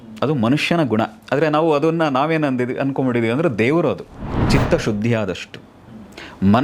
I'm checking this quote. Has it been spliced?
yes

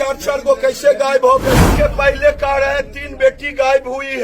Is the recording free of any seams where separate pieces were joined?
no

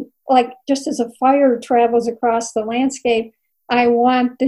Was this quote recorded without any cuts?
yes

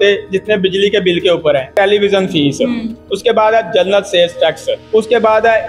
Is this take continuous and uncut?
no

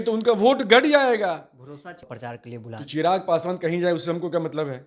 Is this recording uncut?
no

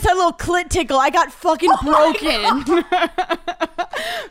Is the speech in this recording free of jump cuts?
yes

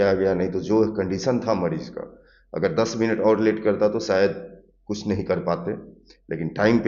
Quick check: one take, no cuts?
yes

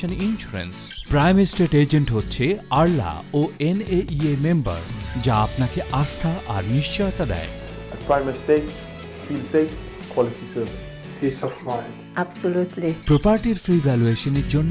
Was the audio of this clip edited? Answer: no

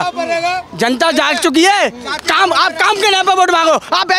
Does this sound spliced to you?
no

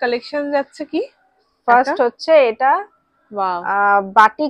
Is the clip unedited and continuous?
yes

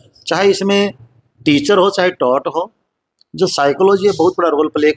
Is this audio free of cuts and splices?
yes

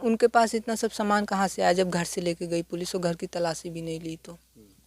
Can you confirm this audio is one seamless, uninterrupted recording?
yes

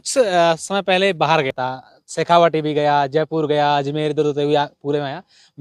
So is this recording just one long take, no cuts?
no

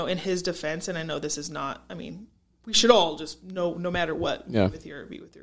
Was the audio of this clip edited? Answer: no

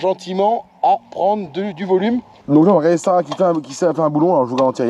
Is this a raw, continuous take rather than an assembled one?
no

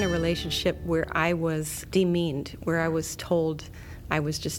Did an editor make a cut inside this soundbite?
yes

